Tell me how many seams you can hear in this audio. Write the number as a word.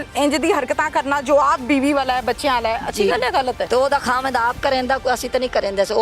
one